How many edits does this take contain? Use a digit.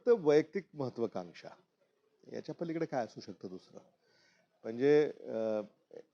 0